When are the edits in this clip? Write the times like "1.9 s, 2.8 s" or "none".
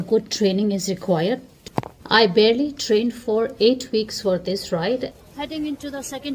1.5 s, 5.2 s